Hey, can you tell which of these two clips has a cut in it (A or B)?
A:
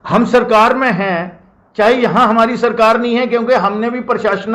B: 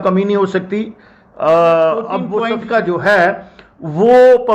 B